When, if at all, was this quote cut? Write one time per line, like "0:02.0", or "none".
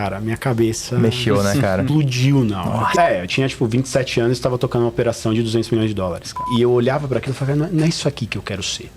0:02.9
0:06.5